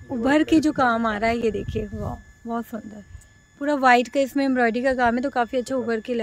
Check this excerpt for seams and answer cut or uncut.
uncut